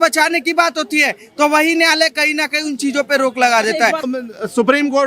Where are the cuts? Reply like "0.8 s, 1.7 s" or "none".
4.1 s